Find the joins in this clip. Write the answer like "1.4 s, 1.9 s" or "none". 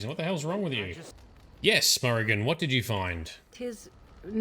1.1 s